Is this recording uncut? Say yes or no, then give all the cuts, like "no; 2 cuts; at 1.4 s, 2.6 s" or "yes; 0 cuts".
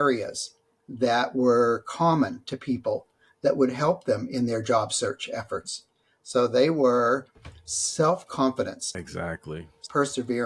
no; 1 cut; at 9.4 s